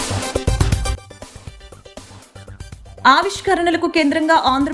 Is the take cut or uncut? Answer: uncut